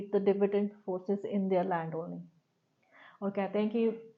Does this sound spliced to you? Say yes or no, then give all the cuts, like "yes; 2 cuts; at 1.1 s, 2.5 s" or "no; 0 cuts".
no; 0 cuts